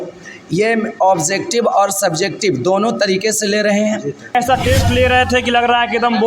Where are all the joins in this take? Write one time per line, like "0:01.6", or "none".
0:04.2